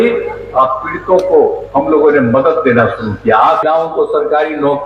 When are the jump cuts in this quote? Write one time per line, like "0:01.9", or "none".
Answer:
0:03.6